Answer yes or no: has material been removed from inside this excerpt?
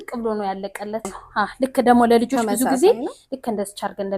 yes